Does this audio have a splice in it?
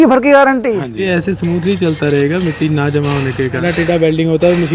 yes; 2 cuts; at 1.1 s, 3.6 s

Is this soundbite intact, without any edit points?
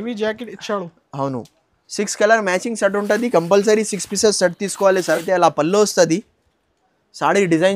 no; 1 cut; at 5.2 s

